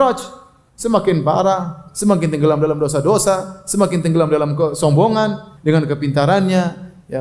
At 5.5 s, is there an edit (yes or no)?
yes